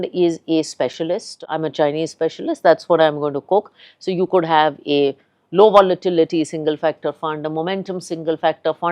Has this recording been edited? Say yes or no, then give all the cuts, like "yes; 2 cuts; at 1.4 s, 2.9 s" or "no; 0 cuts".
yes; 1 cut; at 1.4 s